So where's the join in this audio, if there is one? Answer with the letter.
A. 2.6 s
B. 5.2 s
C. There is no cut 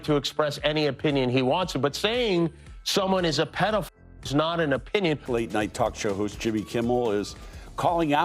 B